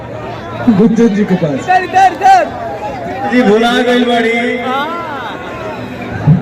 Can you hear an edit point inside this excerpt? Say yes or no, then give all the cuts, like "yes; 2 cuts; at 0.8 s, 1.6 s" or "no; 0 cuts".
yes; 1 cut; at 3.3 s